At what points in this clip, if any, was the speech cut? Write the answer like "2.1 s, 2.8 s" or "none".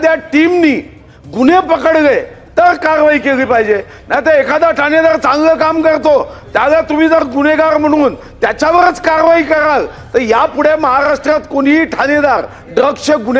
none